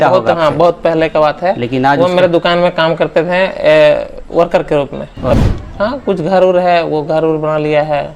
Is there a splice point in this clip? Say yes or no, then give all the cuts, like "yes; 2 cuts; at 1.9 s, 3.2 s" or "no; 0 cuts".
yes; 1 cut; at 5.4 s